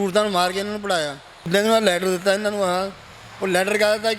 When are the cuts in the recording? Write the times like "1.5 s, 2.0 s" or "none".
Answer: 1.5 s